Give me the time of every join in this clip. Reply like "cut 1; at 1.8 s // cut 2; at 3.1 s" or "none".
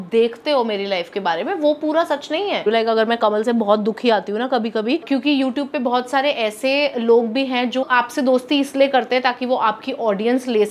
cut 1; at 2.6 s // cut 2; at 5.0 s